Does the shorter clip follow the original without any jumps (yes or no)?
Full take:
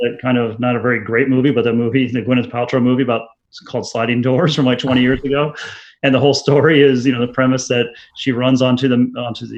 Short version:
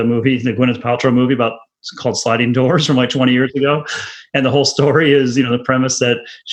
yes